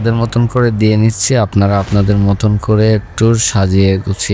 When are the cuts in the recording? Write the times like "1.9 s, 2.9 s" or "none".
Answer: none